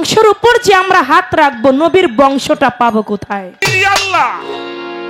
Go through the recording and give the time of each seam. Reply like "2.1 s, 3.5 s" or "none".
3.6 s